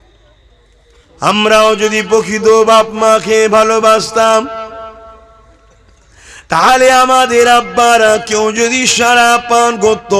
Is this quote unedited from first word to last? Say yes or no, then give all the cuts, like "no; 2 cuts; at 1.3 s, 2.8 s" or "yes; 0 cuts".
no; 1 cut; at 1.0 s